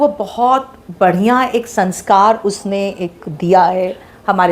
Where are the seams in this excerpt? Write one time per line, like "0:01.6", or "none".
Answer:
none